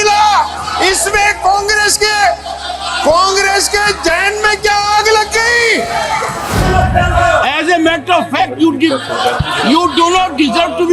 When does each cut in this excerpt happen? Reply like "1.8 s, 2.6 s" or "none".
6.5 s